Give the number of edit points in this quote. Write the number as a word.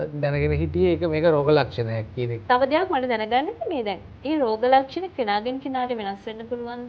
one